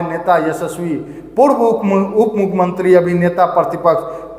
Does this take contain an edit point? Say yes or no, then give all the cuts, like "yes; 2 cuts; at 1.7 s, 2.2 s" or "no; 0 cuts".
no; 0 cuts